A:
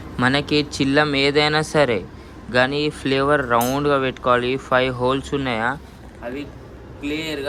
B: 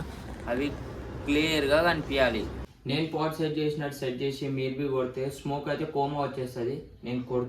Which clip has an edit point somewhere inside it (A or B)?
B